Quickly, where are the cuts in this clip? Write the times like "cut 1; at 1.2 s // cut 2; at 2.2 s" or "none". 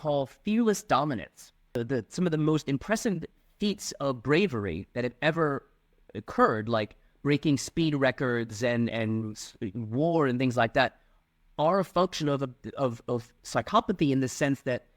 cut 1; at 1.8 s